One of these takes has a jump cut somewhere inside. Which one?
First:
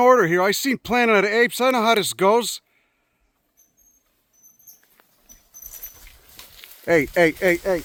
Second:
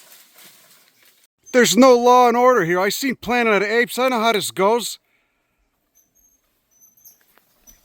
second; 1 cut; at 1.3 s

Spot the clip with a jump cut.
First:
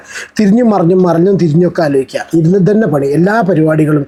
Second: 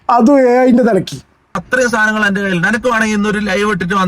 second; 1 cut; at 1.6 s

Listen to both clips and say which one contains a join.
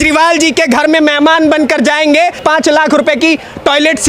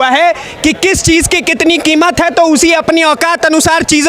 first; 1 cut; at 2.4 s

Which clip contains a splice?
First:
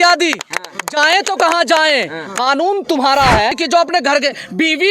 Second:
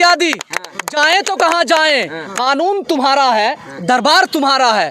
first; 1 cut; at 3.6 s

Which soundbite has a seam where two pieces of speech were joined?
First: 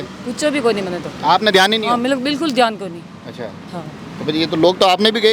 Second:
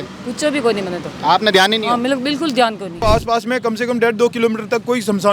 second; 1 cut; at 3.0 s

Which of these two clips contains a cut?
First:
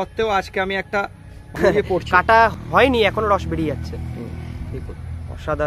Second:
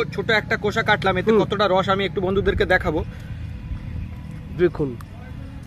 first; 2 cuts; at 1.5 s, 2.5 s

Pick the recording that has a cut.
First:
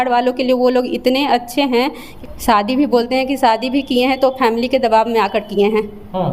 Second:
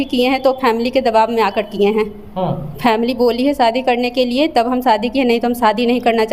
first; 1 cut; at 2.0 s

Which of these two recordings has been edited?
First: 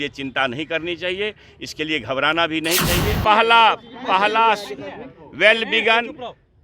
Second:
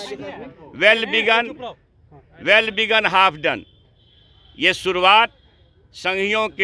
first; 1 cut; at 3.1 s

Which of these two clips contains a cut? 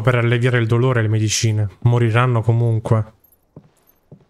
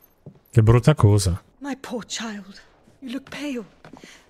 second; 1 cut; at 1.5 s

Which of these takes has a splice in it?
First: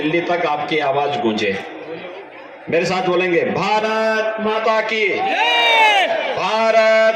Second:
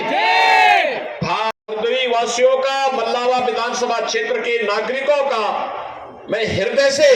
second; 1 cut; at 1.7 s

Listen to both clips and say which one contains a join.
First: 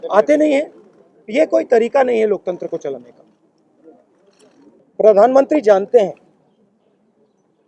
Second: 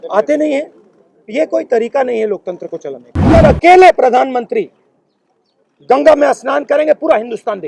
second; 1 cut; at 3.3 s

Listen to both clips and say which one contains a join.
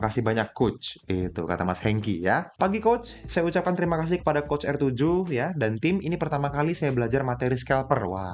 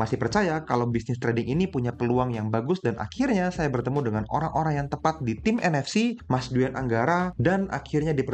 first; 1 cut; at 2.5 s

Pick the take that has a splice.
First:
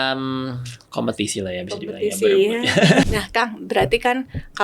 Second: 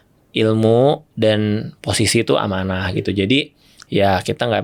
first; 1 cut; at 3.0 s

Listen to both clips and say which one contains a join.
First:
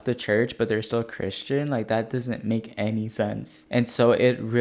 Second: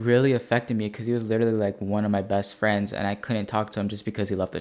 first; 1 cut; at 3.5 s

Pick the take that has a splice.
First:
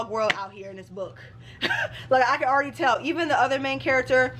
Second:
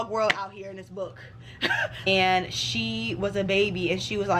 second; 1 cut; at 2.1 s

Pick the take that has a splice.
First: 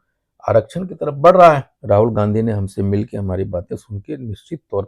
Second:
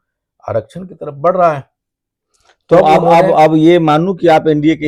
first; 1 cut; at 1.7 s

